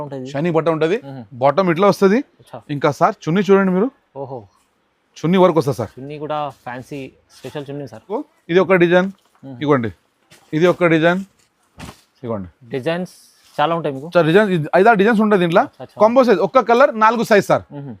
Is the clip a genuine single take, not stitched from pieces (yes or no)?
no